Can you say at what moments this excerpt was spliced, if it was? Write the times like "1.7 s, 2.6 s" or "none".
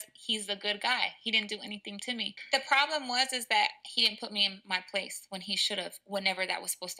none